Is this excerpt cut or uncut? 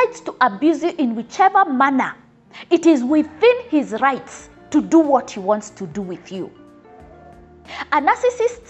uncut